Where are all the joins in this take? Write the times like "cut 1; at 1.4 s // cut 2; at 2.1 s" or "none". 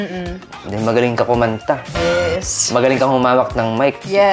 none